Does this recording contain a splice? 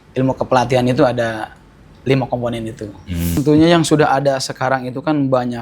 yes; 1 cut; at 3.4 s

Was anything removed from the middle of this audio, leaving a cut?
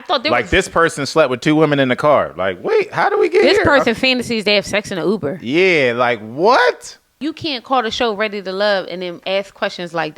yes; 1 cut; at 7.2 s

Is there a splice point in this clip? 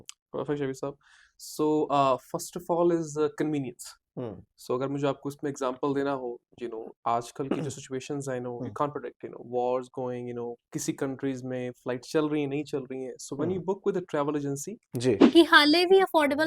yes; 1 cut; at 15.2 s

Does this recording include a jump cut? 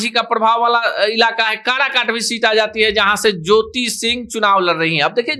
no; 0 cuts

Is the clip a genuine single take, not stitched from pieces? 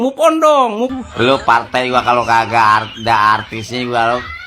no; 1 cut; at 0.9 s

